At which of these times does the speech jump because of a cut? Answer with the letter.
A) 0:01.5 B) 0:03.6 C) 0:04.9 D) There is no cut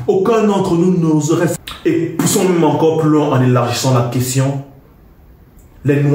A